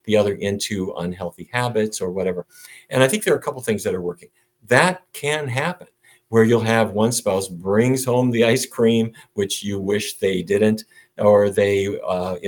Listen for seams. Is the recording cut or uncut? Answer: uncut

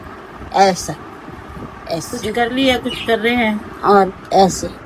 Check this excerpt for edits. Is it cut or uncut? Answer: uncut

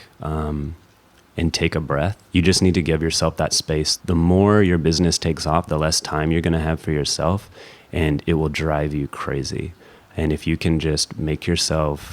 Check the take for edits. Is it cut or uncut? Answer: cut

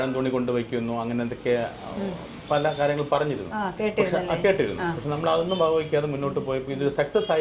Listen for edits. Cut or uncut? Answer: uncut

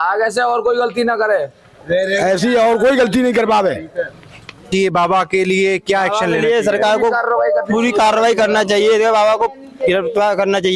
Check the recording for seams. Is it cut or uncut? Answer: cut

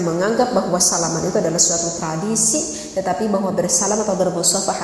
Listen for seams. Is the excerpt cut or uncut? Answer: uncut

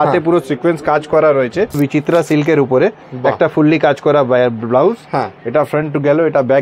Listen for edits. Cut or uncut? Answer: cut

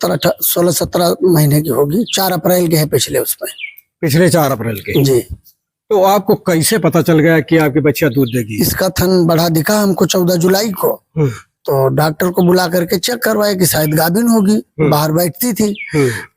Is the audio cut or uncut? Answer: uncut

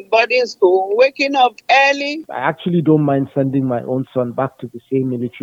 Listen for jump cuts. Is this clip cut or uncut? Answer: cut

